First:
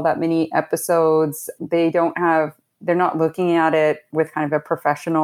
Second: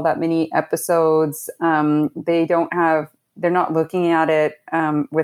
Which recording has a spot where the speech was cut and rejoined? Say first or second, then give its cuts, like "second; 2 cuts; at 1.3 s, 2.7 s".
first; 2 cuts; at 1.6 s, 4.1 s